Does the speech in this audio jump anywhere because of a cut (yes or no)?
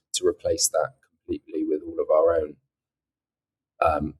no